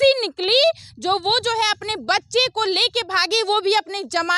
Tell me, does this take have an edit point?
no; 0 cuts

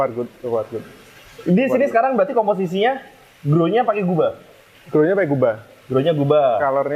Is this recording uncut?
yes; 0 cuts

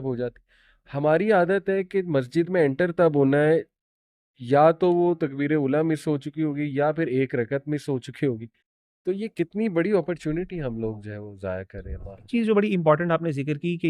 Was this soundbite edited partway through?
yes; 1 cut; at 12.3 s

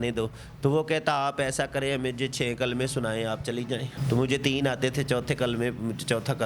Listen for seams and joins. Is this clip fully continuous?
no; 1 cut; at 3.9 s

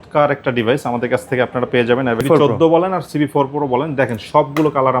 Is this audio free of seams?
no; 1 cut; at 2.2 s

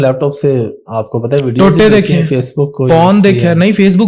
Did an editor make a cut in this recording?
no; 0 cuts

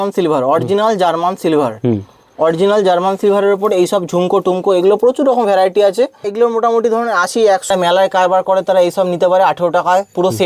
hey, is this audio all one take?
no; 2 cuts; at 6.2 s, 7.7 s

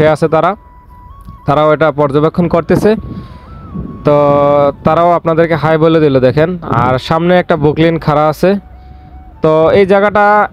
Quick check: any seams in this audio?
no; 0 cuts

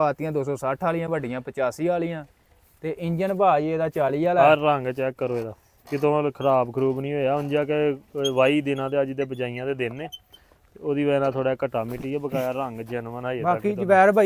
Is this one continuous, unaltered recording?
yes; 0 cuts

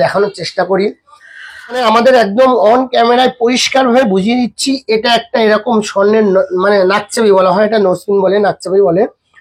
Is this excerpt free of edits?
no; 1 cut; at 1.8 s

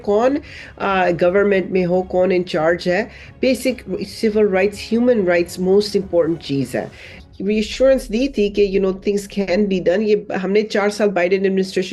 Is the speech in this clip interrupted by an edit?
yes; 1 cut; at 7.2 s

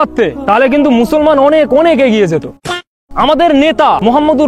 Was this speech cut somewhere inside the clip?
yes; 1 cut; at 2.9 s

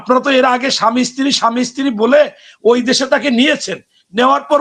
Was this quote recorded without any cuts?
yes; 0 cuts

